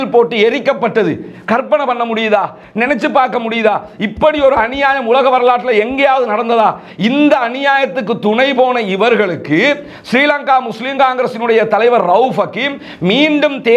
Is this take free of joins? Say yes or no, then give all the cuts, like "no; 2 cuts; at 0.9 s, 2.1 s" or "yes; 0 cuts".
yes; 0 cuts